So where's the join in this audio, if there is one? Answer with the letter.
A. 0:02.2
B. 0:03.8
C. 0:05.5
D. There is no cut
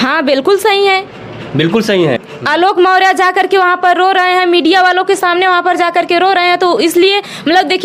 A